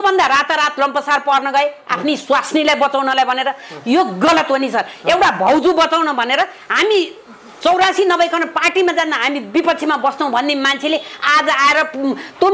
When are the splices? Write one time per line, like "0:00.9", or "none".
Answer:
none